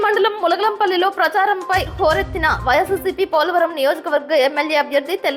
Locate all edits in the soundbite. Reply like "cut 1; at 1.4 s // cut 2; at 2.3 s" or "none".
none

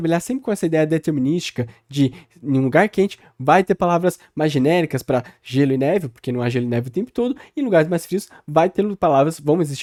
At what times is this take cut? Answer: none

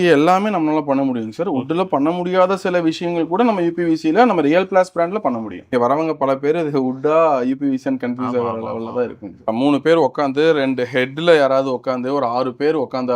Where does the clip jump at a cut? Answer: cut 1; at 5.6 s // cut 2; at 9.5 s

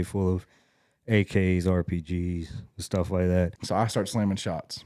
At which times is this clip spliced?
cut 1; at 3.5 s

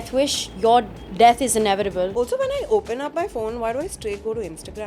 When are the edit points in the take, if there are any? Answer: cut 1; at 1.0 s // cut 2; at 2.1 s

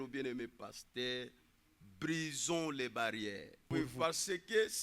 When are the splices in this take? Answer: cut 1; at 3.7 s

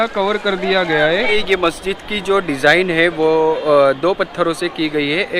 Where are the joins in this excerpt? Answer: cut 1; at 1.3 s

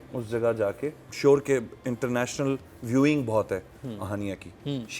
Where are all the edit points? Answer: cut 1; at 1.1 s

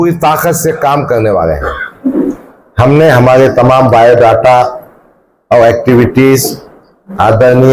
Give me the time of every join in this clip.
cut 1; at 1.9 s

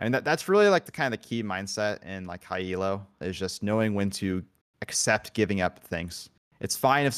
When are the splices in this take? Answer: cut 1; at 0.9 s // cut 2; at 3.2 s

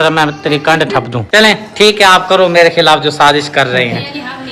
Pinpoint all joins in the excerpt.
cut 1; at 1.2 s

